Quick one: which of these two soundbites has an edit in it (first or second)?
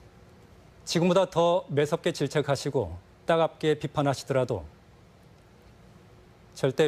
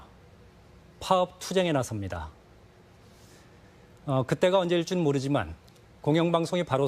second